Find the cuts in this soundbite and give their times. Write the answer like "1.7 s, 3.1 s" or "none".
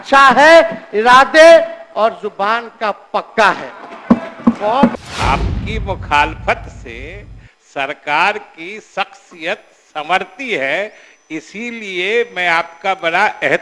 4.9 s